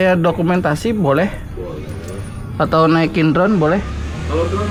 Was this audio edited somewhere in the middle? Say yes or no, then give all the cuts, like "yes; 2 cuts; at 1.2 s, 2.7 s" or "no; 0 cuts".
no; 0 cuts